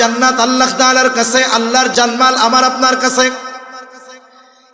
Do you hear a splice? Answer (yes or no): yes